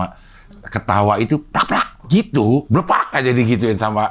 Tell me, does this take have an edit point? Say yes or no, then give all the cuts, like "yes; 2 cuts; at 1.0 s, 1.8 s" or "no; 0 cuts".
yes; 1 cut; at 2.6 s